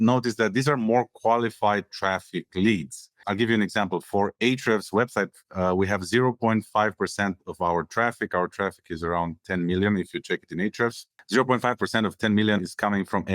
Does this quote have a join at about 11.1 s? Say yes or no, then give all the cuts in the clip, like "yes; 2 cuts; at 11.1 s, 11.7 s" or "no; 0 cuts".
yes; 2 cuts; at 3.2 s, 11.1 s